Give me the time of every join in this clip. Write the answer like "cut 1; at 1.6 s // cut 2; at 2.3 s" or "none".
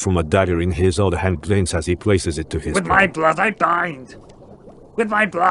cut 1; at 2.7 s

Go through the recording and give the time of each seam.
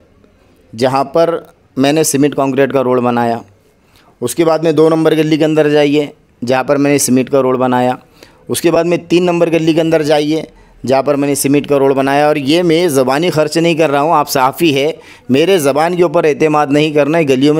none

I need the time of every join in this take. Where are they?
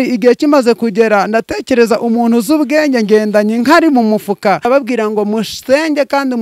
cut 1; at 4.7 s

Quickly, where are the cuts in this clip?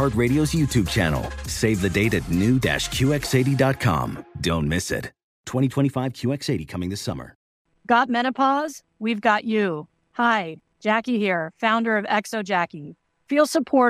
cut 1; at 7.5 s

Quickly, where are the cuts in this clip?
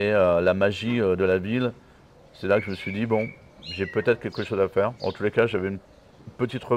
none

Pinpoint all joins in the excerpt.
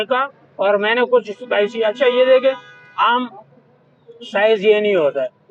none

